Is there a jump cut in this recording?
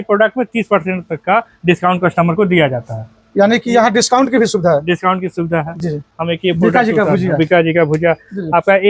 yes; 1 cut; at 6.1 s

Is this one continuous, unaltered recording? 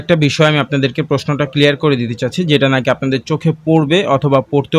yes; 0 cuts

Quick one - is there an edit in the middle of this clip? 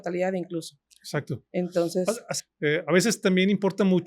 yes; 1 cut; at 2.3 s

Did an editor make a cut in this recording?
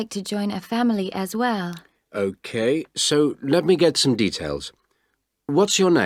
no; 0 cuts

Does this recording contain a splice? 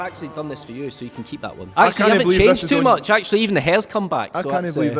yes; 1 cut; at 1.6 s

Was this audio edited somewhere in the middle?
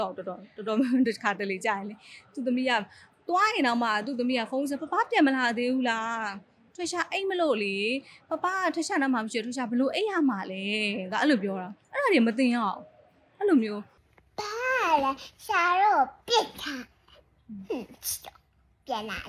no; 0 cuts

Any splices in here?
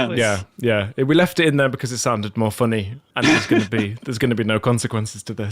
yes; 1 cut; at 3.0 s

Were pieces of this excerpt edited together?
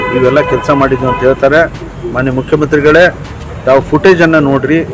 no; 0 cuts

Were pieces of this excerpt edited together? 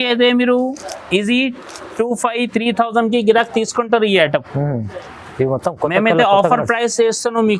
no; 0 cuts

